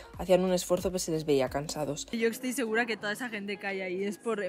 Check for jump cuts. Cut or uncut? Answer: cut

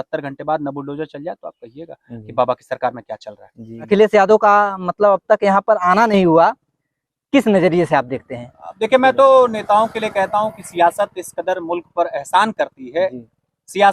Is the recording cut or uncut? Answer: cut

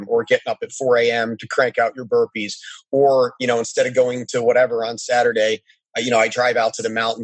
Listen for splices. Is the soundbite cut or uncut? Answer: uncut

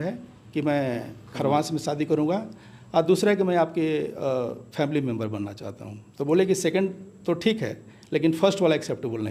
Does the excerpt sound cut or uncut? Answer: uncut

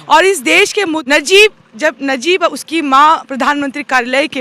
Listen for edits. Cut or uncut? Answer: cut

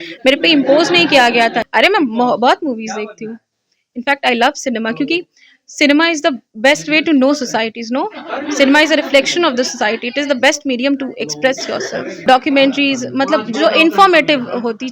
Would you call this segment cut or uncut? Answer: cut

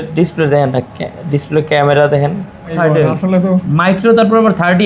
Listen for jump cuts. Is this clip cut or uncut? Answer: cut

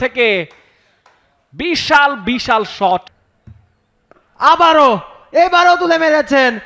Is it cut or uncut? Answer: cut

